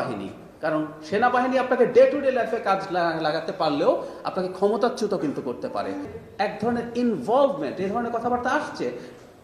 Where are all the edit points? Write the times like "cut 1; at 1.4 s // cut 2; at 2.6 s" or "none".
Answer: cut 1; at 6.1 s